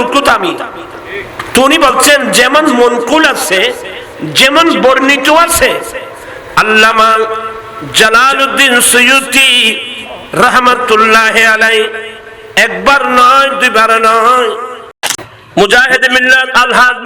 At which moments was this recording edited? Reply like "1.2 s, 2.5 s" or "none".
15.0 s